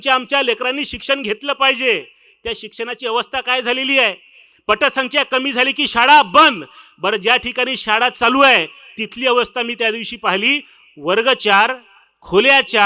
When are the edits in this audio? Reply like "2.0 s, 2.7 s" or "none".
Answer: none